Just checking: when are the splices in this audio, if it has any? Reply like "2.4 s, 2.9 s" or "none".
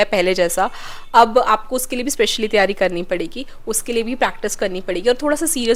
none